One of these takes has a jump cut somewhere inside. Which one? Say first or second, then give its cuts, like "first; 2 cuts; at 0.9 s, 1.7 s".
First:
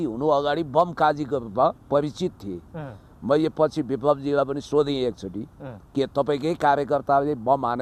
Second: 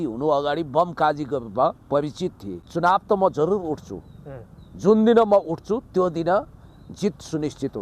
second; 1 cut; at 2.7 s